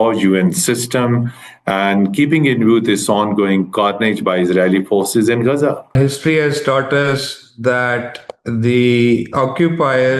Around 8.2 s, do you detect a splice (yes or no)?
no